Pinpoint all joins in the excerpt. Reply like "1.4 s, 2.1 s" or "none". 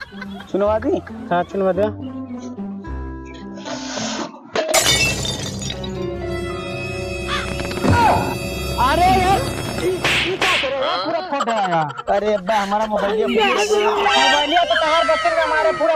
none